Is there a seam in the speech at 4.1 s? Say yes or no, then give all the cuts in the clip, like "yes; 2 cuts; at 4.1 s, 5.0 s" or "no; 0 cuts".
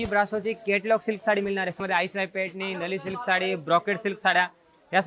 no; 1 cut; at 1.7 s